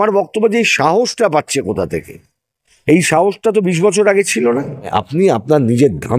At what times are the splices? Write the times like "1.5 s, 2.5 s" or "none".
4.9 s